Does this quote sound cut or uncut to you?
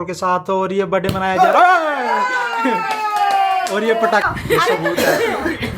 cut